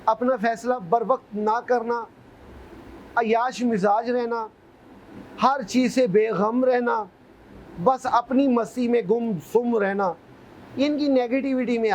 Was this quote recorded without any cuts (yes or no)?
yes